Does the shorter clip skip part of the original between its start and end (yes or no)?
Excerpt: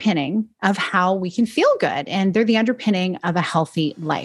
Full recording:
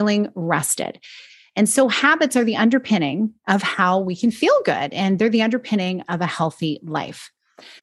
no